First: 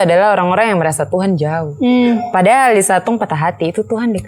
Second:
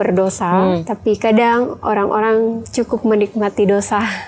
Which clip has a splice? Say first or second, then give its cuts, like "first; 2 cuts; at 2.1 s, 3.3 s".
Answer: second; 2 cuts; at 0.9 s, 2.6 s